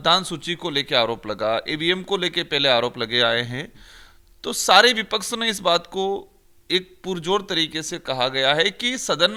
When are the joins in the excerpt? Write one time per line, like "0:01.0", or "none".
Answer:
none